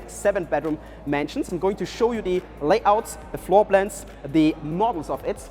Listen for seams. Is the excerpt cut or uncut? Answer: uncut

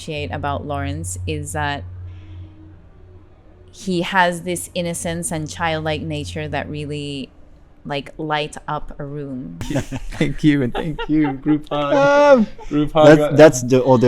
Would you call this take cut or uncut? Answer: cut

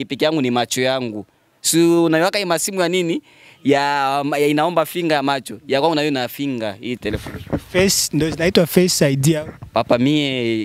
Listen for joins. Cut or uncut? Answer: uncut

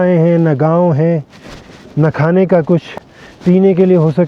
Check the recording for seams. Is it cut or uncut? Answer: uncut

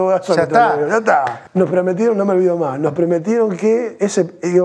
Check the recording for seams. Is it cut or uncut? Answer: cut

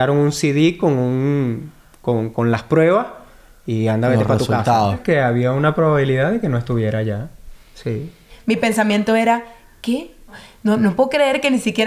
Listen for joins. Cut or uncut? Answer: cut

